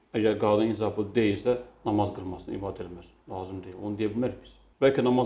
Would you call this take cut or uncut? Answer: uncut